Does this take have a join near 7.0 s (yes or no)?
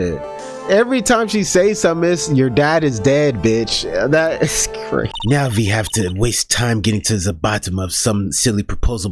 no